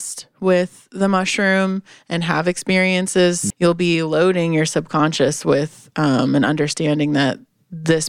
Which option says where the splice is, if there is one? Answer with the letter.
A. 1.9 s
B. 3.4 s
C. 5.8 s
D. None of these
B